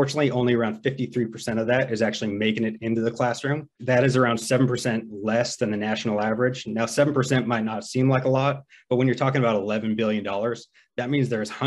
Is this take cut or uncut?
cut